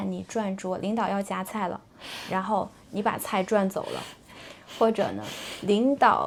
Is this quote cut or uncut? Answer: uncut